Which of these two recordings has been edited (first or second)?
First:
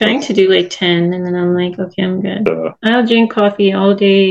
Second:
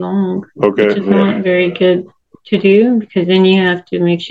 first